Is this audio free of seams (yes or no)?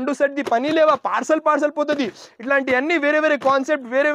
yes